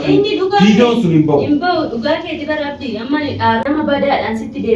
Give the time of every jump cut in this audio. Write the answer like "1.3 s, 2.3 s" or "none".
3.6 s

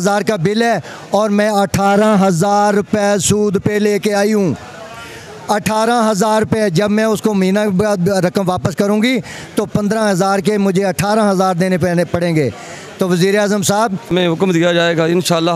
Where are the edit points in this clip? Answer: 14.1 s

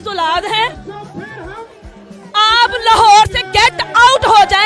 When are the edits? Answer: none

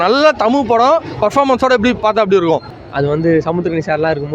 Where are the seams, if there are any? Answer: 2.7 s

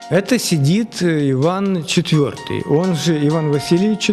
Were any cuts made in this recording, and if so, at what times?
none

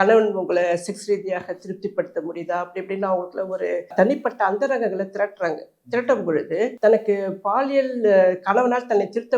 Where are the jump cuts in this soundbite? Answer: 3.9 s, 6.7 s

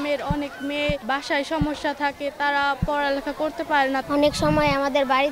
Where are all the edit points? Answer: 1.0 s

